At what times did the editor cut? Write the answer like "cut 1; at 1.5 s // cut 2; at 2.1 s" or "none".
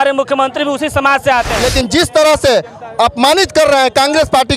cut 1; at 1.5 s